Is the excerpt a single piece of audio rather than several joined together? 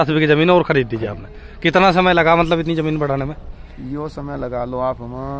yes; 0 cuts

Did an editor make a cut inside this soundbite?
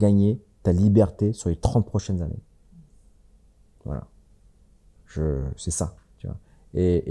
no; 0 cuts

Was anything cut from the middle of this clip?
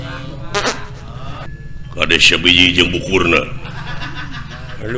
yes; 1 cut; at 1.4 s

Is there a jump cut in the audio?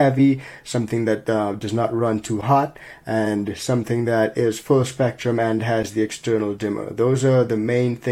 no; 0 cuts

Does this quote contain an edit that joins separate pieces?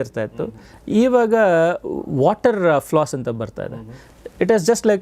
no; 0 cuts

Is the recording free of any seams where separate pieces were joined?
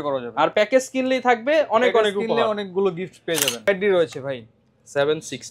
no; 1 cut; at 3.7 s

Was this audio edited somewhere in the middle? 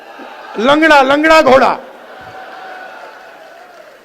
no; 0 cuts

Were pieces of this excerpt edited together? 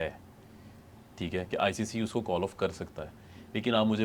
no; 0 cuts

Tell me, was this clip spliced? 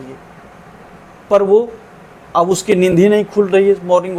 no; 0 cuts

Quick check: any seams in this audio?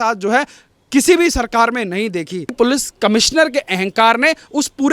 yes; 1 cut; at 2.5 s

